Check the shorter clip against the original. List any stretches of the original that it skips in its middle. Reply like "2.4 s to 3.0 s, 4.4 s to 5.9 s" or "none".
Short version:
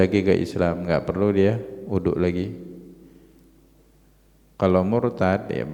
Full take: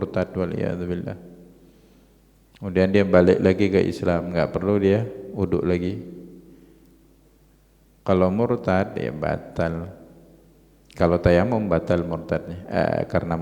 none